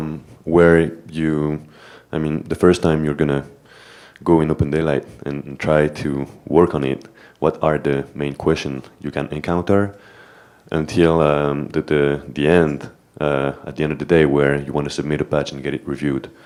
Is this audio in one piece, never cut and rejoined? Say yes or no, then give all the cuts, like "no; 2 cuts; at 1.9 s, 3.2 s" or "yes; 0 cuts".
yes; 0 cuts